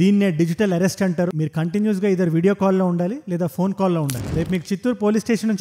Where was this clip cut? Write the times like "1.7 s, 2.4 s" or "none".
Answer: 1.4 s, 4.2 s